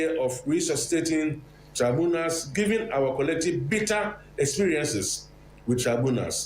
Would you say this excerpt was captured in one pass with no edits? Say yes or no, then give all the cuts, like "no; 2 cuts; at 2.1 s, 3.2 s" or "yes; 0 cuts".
yes; 0 cuts